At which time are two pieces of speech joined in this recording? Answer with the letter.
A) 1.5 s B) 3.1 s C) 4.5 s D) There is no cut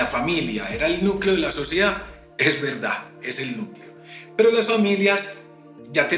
D